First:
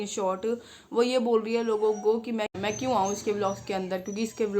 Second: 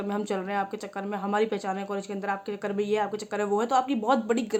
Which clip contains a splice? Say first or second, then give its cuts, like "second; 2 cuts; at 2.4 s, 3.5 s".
first; 1 cut; at 2.5 s